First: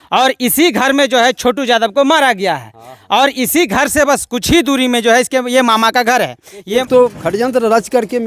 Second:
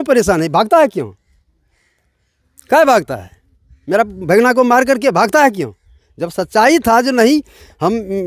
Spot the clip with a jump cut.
first; 1 cut; at 6.9 s

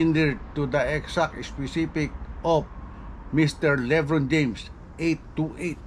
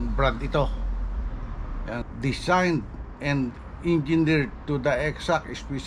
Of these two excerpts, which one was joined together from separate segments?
second; 1 cut; at 2.0 s

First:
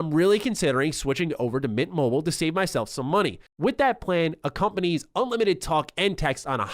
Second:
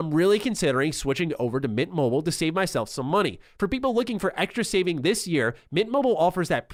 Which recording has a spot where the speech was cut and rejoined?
first; 1 cut; at 3.5 s

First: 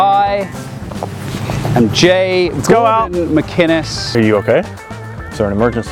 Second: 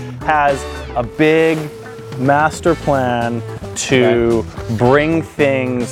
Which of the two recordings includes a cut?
first; 1 cut; at 4.1 s

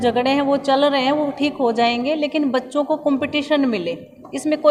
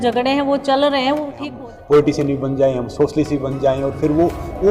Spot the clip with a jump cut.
second; 1 cut; at 1.4 s

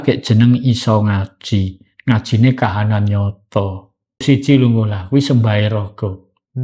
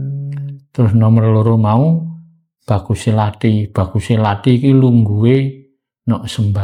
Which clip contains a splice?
first; 1 cut; at 4.2 s

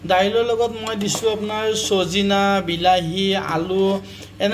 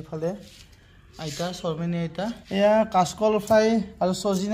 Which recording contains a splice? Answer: second; 1 cut; at 2.4 s

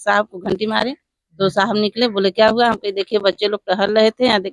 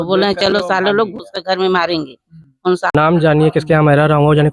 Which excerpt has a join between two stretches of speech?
second; 1 cut; at 2.9 s

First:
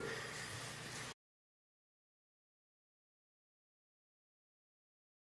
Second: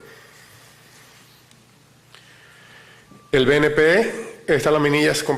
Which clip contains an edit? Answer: second; 1 cut; at 1.1 s

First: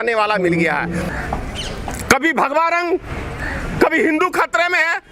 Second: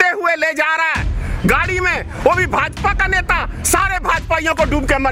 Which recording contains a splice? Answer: first; 1 cut; at 1.1 s

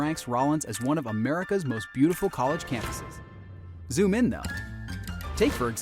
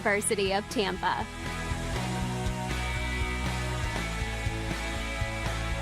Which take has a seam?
second; 1 cut; at 1.2 s

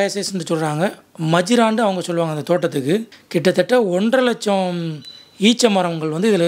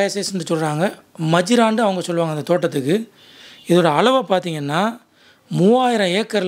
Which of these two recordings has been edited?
first; 1 cut; at 3.2 s

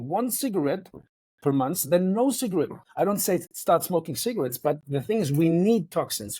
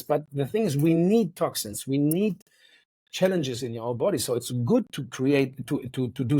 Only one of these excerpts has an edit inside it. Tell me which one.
first; 1 cut; at 2.8 s

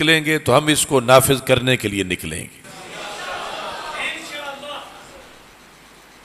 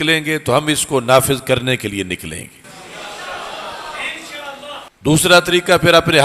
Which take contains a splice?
second; 1 cut; at 4.9 s

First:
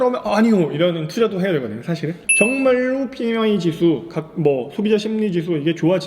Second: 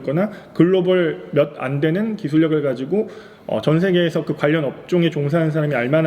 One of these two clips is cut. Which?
first; 1 cut; at 1.9 s

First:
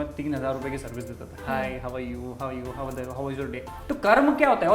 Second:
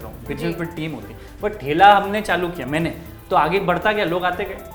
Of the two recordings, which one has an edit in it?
first; 1 cut; at 3.6 s

